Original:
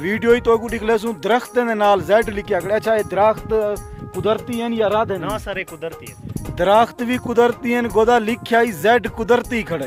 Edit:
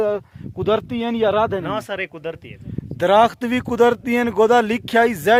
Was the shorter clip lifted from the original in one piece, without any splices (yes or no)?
yes